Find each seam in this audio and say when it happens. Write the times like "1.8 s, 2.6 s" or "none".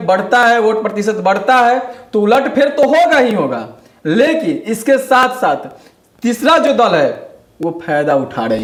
none